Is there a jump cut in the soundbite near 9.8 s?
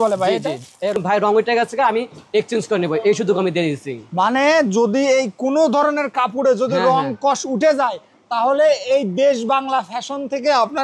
no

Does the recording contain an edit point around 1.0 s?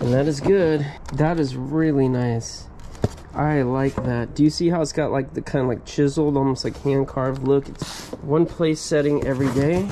yes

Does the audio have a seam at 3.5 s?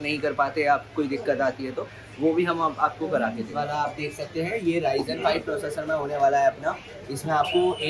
yes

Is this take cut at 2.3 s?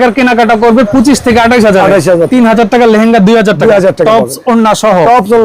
yes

